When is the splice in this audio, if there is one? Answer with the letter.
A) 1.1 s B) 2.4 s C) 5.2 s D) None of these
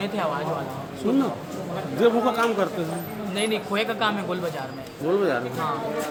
D